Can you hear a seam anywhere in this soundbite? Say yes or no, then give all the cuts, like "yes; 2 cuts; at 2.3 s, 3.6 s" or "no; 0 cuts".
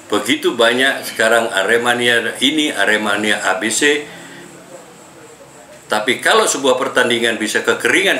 no; 0 cuts